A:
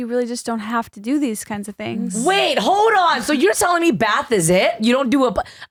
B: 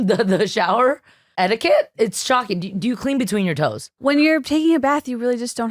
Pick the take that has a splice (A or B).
B